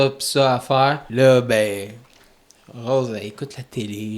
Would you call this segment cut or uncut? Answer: cut